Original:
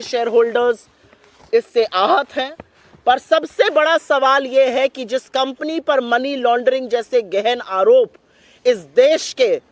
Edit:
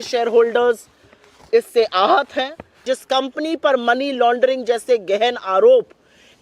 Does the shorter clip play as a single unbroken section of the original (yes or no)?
no